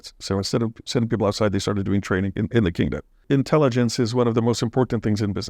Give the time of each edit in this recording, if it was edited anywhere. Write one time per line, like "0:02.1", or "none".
0:03.2